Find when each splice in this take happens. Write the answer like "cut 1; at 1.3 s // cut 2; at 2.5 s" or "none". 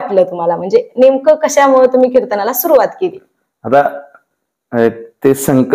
none